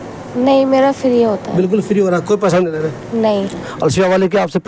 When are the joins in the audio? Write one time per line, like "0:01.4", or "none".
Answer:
0:03.6

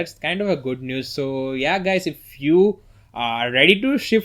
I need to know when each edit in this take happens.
none

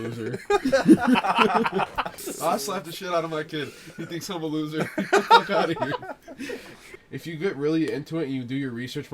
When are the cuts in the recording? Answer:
0:02.2
0:07.1

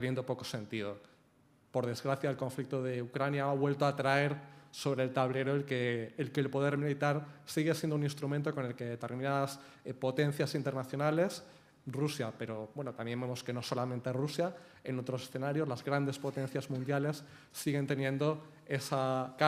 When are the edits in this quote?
none

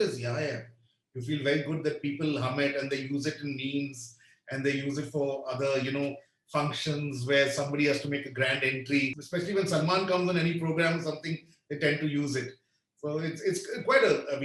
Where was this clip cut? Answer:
0:09.2

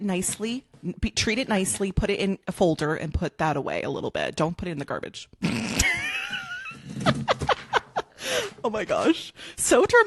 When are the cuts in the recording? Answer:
none

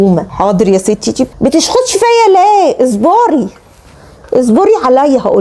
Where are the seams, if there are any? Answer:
none

